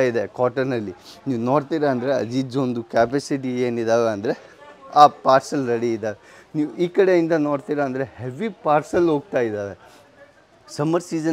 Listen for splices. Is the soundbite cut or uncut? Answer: uncut